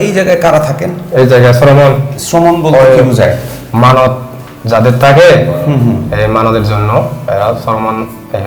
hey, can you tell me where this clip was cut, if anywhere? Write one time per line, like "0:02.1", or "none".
none